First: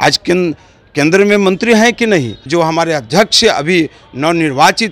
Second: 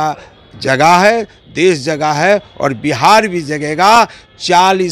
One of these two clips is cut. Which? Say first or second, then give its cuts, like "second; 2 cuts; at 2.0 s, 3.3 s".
first; 1 cut; at 2.4 s